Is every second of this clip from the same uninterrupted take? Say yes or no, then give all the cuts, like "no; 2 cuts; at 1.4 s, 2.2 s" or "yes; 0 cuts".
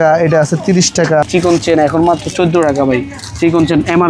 no; 1 cut; at 1.3 s